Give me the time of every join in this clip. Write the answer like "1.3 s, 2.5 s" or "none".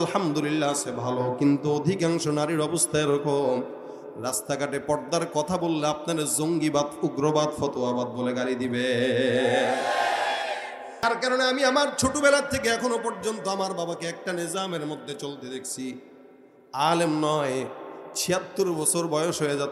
11.0 s